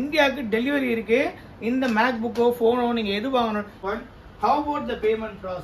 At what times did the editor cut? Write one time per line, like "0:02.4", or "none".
0:03.8